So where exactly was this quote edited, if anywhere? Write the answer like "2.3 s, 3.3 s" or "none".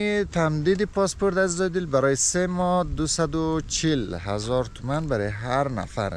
none